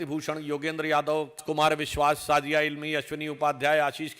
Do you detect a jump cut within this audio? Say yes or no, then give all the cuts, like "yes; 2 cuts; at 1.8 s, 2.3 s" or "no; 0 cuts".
yes; 1 cut; at 1.4 s